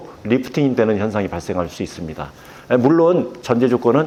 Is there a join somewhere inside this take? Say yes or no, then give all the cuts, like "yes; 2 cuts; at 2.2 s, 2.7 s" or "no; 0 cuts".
no; 0 cuts